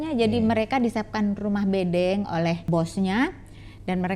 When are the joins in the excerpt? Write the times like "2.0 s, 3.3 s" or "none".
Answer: 2.7 s